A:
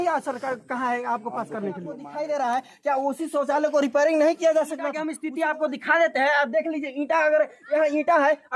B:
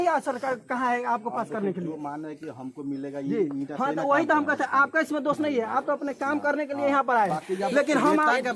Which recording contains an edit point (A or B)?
A